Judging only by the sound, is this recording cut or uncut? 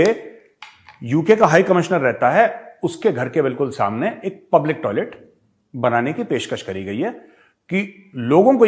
uncut